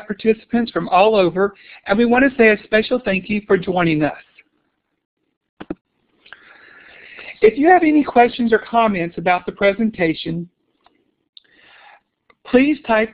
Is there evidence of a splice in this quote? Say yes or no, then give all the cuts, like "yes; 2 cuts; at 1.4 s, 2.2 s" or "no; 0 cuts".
yes; 1 cut; at 10.2 s